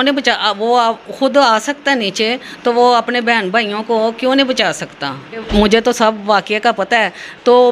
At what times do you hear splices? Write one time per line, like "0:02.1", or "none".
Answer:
0:05.5